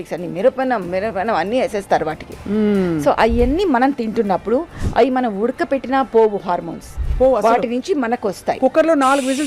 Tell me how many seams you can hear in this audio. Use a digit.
0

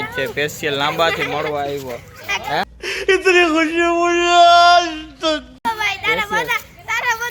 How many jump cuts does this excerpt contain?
2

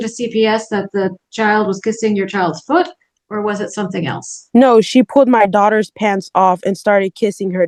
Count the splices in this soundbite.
0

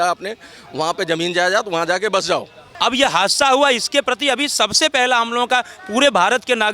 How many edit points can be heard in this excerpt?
1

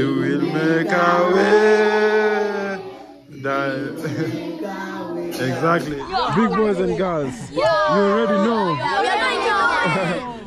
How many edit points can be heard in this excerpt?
1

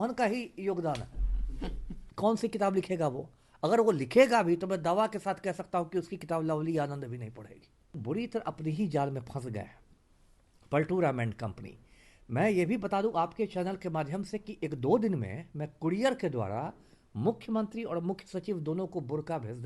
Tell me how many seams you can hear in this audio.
2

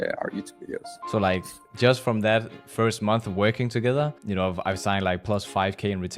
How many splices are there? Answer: 3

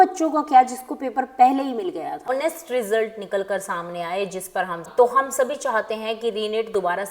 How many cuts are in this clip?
2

